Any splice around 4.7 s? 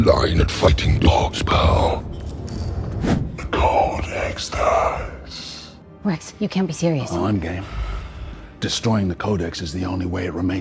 no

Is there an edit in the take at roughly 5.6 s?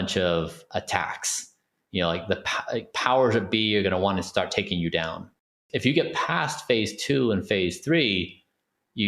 yes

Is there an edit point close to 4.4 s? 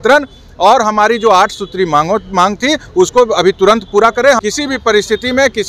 yes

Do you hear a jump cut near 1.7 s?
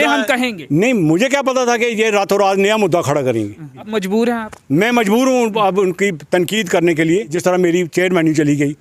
no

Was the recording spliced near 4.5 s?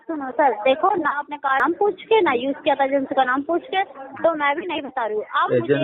no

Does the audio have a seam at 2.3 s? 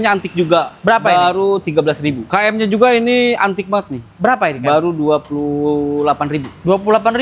yes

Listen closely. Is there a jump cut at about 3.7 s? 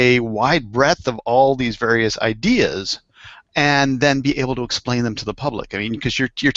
no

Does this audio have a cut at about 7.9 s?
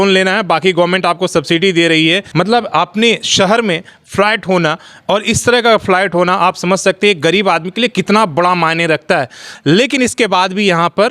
no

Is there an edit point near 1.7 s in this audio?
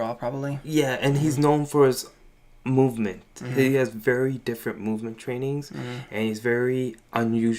no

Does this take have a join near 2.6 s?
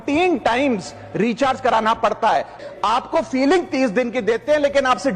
yes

